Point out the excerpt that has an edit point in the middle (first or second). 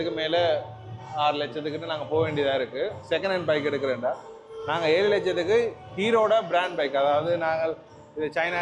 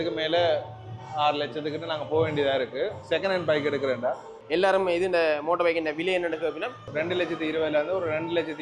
second